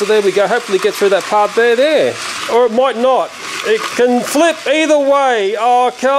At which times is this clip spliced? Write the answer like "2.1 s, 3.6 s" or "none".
2.3 s